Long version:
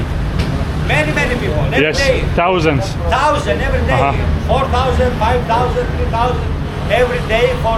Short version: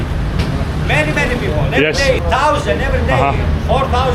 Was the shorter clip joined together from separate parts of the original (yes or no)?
yes